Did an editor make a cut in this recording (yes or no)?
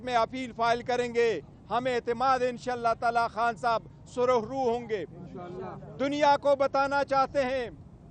no